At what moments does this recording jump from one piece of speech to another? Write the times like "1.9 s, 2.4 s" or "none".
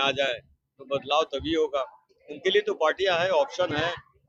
none